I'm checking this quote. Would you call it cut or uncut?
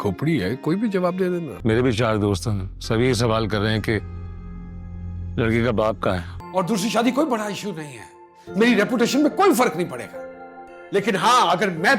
cut